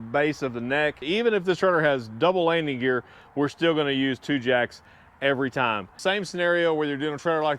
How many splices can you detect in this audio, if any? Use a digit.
2